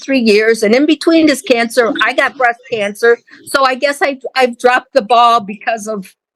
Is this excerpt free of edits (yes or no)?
yes